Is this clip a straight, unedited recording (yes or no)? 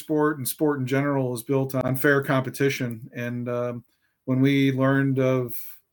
yes